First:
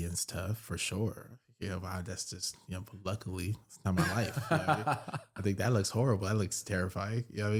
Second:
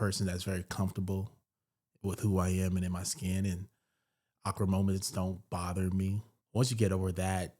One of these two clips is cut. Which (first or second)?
second